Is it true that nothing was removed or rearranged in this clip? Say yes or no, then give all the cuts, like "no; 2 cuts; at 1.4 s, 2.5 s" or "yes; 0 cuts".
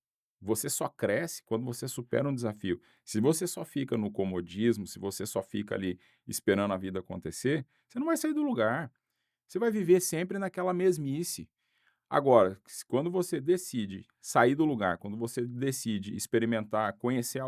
yes; 0 cuts